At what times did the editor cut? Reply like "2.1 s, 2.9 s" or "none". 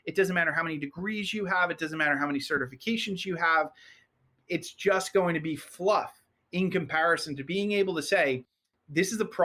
7.4 s